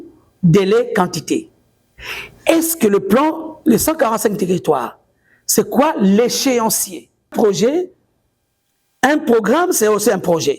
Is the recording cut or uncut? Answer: cut